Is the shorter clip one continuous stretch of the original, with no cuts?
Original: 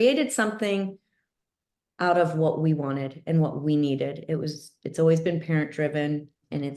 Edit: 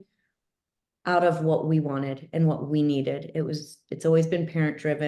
yes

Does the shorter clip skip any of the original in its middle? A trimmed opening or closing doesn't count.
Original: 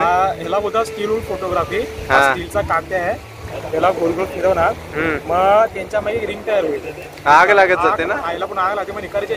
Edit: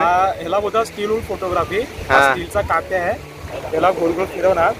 no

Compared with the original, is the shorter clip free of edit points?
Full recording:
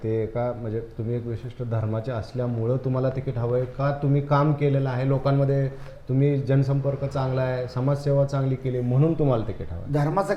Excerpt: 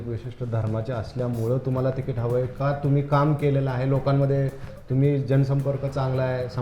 yes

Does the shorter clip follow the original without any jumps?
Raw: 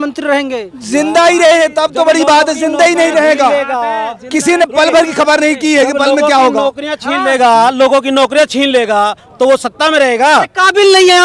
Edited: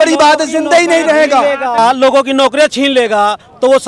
no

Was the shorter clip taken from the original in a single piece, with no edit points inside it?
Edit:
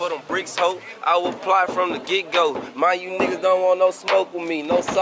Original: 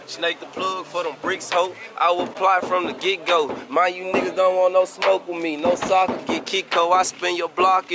yes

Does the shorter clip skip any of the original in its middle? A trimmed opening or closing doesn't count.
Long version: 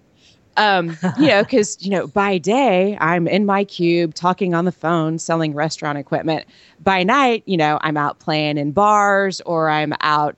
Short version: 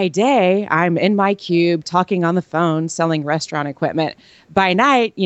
no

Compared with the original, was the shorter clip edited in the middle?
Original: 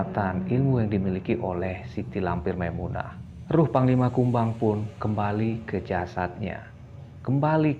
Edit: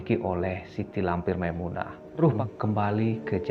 yes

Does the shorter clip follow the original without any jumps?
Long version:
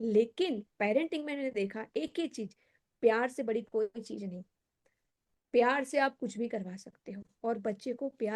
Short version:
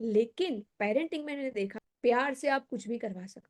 no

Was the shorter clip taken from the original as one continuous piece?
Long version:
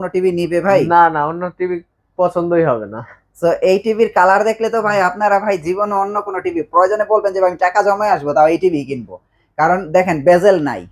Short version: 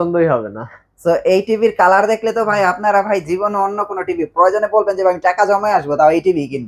yes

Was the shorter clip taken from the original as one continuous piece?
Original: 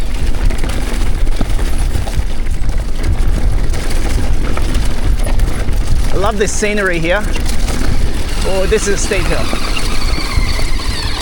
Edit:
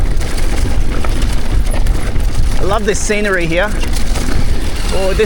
yes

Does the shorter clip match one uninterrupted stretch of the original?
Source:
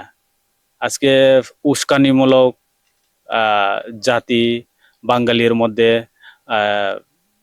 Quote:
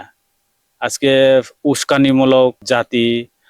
no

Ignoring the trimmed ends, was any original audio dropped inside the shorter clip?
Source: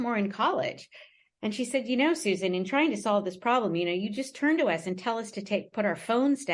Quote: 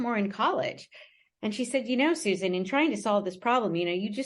no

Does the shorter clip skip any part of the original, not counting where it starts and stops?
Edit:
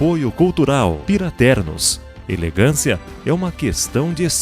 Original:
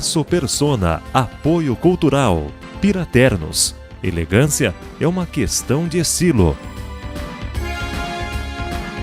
yes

